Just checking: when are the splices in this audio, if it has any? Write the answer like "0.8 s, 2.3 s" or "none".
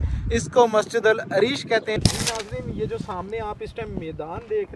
2.0 s

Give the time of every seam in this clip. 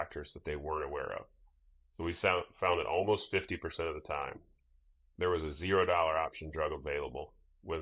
none

